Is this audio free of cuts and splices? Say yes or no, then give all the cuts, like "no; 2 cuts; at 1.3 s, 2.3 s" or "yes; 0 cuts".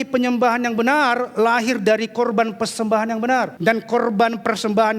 no; 1 cut; at 3.5 s